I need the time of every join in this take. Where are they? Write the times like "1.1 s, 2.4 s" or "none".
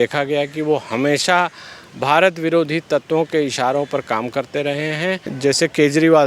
5.3 s